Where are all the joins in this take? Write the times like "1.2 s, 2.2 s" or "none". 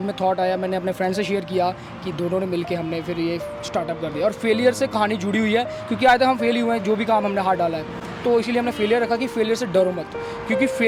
none